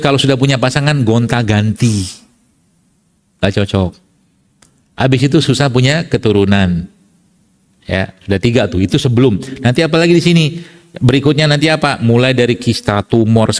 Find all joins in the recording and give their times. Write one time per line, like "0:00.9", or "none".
none